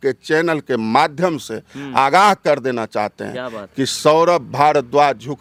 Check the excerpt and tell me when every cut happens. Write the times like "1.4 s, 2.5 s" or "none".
none